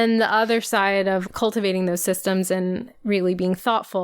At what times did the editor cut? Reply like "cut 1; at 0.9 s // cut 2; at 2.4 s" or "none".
cut 1; at 1.2 s // cut 2; at 2.9 s